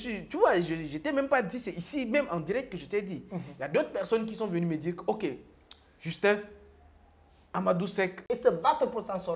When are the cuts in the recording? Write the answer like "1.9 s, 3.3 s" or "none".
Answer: 8.2 s